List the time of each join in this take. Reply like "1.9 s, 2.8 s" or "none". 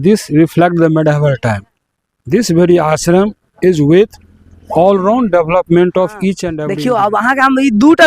6.5 s